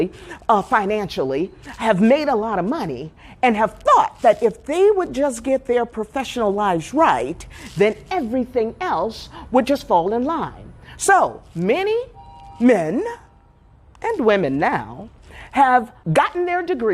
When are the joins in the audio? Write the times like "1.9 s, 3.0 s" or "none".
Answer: 16.0 s